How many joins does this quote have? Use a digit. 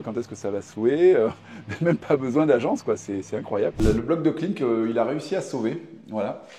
1